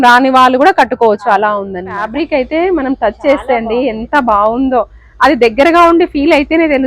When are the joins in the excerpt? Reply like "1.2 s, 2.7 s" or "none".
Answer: 2.0 s